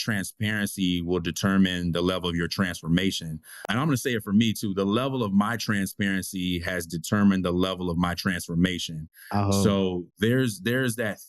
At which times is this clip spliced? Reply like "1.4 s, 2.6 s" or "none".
3.4 s